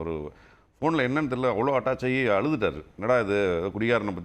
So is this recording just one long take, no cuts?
no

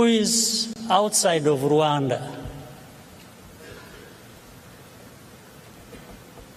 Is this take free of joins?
yes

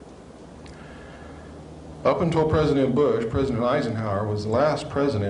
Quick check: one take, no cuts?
no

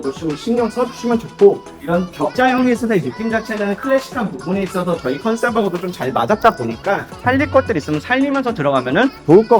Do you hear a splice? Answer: yes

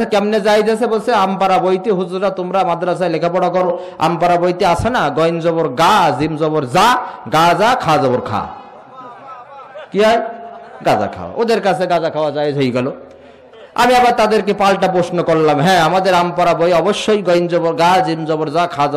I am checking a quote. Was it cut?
no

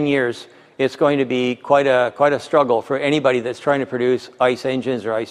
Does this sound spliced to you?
no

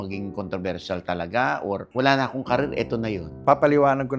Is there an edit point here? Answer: yes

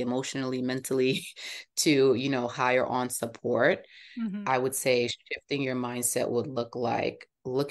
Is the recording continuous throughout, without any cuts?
yes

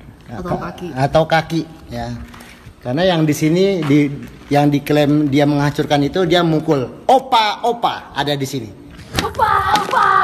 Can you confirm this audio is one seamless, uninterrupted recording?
no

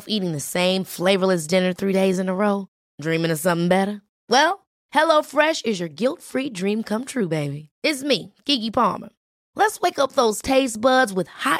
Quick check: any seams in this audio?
no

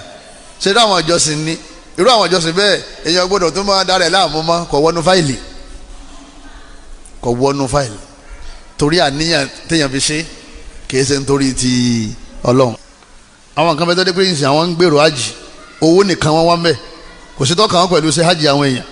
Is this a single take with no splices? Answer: no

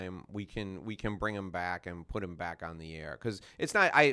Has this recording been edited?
no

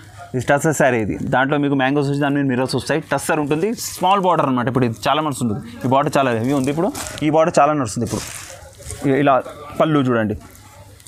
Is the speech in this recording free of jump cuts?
yes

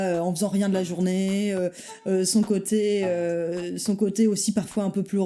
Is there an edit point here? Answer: no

